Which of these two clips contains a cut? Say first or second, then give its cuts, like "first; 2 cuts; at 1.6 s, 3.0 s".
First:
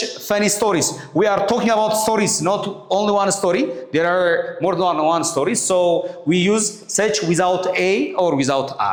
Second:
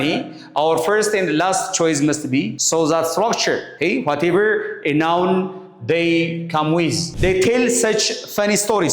second; 3 cuts; at 2.6 s, 3.7 s, 7.1 s